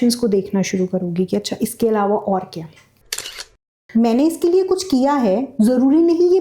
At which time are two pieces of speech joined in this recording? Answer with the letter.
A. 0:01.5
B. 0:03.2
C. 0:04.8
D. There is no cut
B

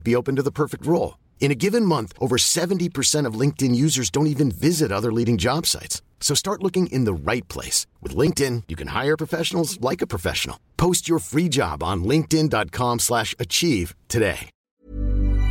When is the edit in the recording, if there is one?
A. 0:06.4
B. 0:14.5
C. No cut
B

